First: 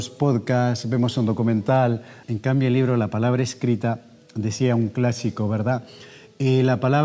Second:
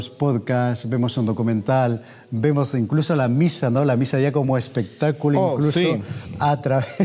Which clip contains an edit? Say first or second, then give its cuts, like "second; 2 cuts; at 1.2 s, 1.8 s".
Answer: first; 1 cut; at 2.1 s